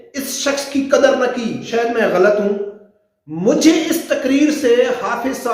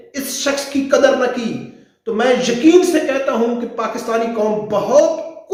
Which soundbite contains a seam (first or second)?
first